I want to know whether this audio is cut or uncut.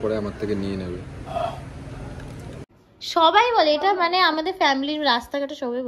cut